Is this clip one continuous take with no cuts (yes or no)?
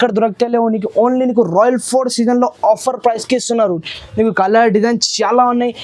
yes